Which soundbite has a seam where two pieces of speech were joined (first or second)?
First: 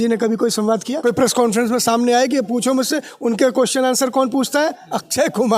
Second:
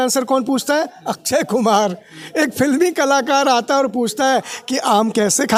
first